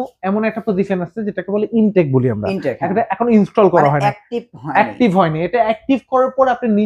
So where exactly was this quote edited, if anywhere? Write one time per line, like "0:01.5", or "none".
none